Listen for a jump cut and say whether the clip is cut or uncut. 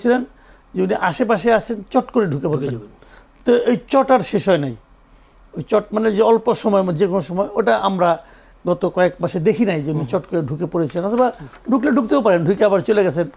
uncut